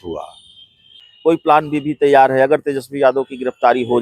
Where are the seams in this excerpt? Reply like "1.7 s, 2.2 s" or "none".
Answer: 1.0 s